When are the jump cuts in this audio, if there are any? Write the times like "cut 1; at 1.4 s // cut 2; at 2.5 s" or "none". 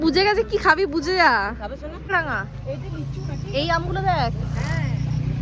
cut 1; at 2.1 s